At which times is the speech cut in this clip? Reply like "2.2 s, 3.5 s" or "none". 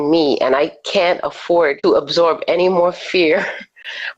1.8 s